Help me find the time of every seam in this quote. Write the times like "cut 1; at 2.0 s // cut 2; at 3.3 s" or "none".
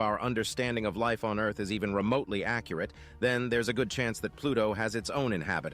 none